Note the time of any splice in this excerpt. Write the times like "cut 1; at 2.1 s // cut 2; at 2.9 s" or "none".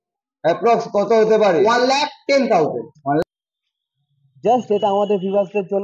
cut 1; at 3.2 s